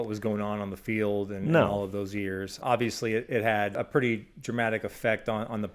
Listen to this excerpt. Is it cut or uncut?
cut